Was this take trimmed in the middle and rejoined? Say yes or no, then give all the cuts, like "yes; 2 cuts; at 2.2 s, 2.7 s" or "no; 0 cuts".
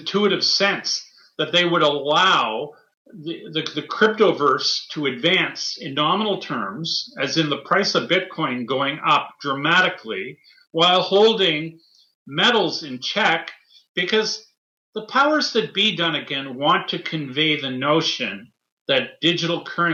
no; 0 cuts